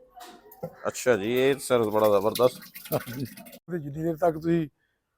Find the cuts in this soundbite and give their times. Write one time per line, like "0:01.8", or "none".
0:03.6